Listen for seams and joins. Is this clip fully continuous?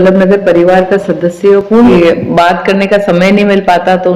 no; 1 cut; at 1.8 s

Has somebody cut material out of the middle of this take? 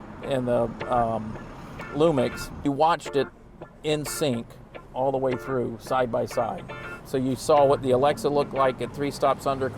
yes; 1 cut; at 2.6 s

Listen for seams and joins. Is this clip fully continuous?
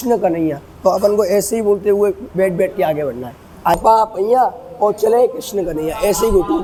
yes; 0 cuts

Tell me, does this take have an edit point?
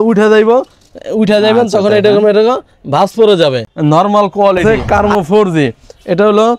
yes; 2 cuts; at 3.7 s, 4.6 s

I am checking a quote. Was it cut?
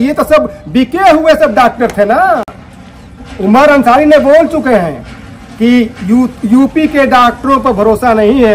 no; 0 cuts

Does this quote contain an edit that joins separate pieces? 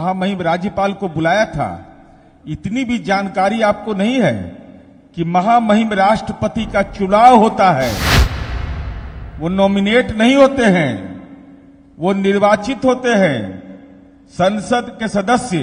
no; 0 cuts

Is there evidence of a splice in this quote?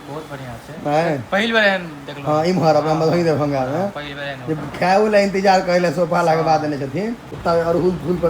yes; 1 cut; at 7.3 s

